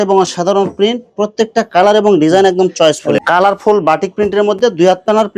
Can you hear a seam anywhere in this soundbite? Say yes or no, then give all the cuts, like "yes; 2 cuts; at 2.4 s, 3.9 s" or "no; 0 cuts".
yes; 1 cut; at 3.2 s